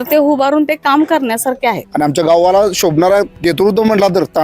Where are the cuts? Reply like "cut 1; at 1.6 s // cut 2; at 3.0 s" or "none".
cut 1; at 1.9 s // cut 2; at 3.3 s